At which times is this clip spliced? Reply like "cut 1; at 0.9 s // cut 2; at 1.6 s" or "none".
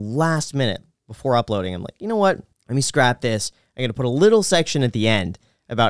cut 1; at 2.5 s